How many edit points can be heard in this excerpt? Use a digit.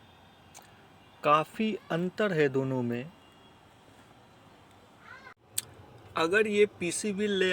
1